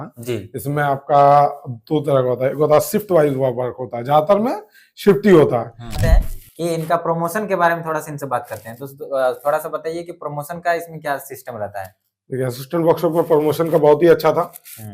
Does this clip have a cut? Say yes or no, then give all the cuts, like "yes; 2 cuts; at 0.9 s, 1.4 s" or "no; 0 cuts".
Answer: yes; 1 cut; at 5.9 s